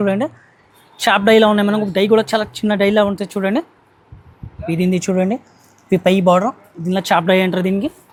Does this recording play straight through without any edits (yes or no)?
yes